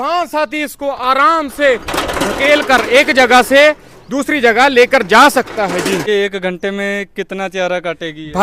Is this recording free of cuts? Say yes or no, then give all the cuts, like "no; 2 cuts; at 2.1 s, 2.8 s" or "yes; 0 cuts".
yes; 0 cuts